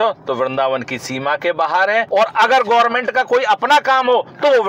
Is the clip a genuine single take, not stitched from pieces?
yes; 0 cuts

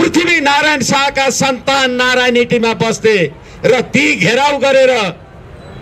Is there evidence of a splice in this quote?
no; 0 cuts

